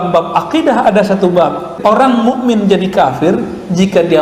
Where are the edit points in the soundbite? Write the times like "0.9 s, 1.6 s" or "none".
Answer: 1.7 s